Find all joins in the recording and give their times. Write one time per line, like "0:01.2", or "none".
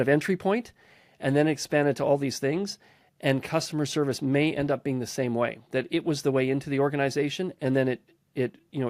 none